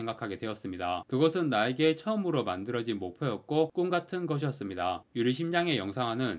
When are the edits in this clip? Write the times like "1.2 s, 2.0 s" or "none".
none